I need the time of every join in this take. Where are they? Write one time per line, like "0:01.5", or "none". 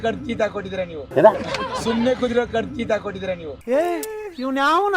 none

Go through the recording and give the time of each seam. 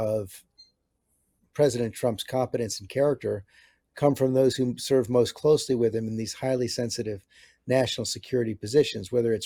none

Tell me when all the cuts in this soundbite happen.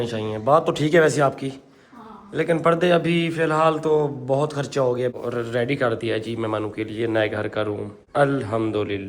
0:05.1
0:07.9

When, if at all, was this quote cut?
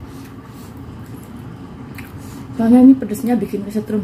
none

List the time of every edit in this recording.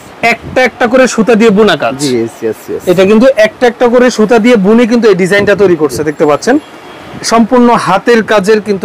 none

